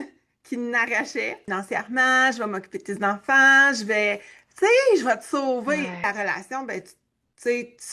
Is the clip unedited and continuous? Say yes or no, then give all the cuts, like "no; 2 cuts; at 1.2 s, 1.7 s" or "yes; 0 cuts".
no; 2 cuts; at 1.4 s, 6.0 s